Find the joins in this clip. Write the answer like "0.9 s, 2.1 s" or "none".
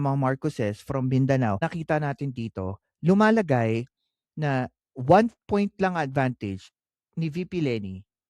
1.6 s